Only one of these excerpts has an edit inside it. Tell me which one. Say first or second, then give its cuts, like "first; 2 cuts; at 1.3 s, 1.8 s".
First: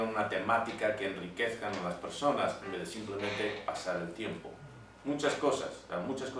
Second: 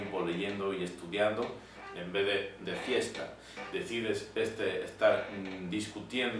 first; 1 cut; at 2.0 s